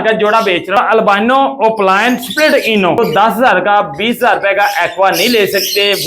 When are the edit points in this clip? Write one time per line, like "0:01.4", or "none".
0:00.8
0:03.0